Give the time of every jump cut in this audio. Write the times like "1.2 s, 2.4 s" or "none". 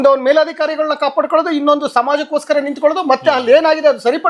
none